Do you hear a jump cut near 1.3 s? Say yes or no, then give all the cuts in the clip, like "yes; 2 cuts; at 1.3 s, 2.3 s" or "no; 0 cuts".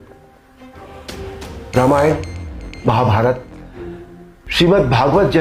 yes; 1 cut; at 1.3 s